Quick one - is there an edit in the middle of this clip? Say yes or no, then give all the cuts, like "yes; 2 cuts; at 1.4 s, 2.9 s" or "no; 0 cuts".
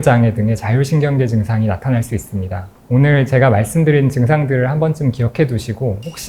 yes; 1 cut; at 2.6 s